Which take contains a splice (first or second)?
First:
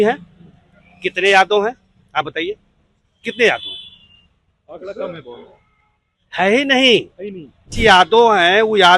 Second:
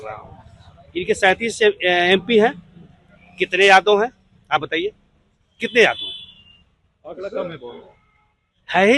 first